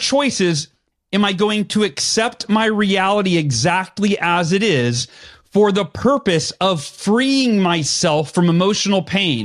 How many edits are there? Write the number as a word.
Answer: zero